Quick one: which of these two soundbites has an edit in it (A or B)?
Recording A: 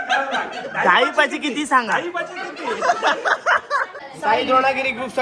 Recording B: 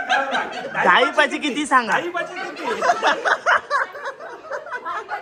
A